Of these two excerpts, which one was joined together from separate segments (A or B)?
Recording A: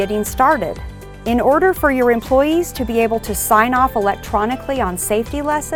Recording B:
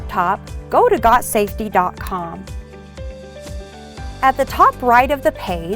B